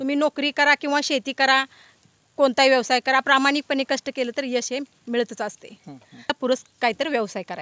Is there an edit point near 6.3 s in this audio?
yes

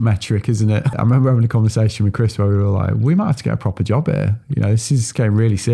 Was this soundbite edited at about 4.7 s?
no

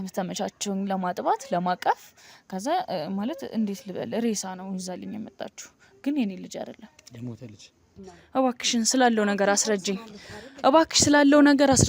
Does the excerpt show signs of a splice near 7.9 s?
yes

